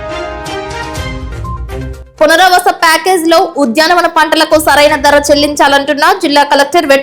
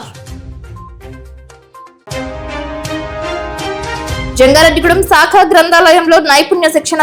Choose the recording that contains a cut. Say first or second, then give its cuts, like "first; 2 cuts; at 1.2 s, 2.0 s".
first; 1 cut; at 1.1 s